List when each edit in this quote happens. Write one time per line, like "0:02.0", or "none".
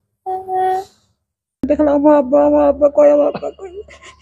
0:01.7